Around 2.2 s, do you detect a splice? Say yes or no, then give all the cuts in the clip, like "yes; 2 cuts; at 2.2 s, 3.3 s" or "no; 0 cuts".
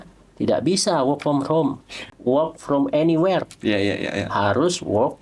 yes; 1 cut; at 2.2 s